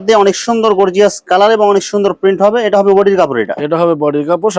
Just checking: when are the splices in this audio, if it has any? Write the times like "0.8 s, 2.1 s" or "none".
none